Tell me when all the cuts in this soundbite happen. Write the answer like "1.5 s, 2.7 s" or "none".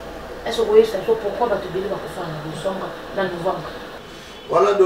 4.0 s